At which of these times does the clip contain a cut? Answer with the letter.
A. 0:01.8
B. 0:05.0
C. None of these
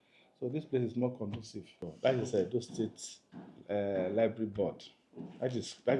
A